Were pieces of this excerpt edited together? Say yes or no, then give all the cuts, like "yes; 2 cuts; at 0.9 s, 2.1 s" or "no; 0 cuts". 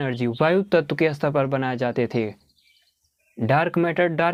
no; 0 cuts